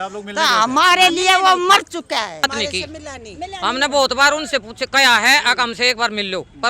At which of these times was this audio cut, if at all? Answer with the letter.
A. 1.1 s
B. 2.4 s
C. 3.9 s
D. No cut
B